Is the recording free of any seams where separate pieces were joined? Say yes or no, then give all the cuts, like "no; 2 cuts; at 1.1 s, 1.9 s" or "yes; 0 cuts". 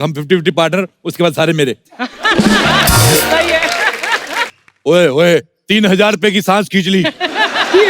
no; 1 cut; at 4.6 s